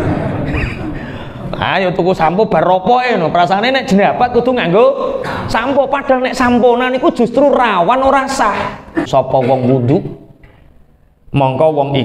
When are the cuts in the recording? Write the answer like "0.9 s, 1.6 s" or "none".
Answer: 9.1 s